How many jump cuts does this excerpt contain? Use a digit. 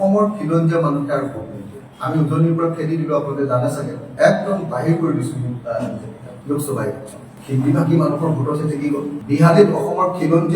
3